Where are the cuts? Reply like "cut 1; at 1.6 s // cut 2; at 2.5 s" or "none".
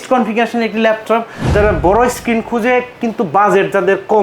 cut 1; at 1.5 s